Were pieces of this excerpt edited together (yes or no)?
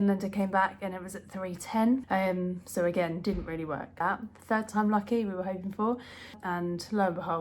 yes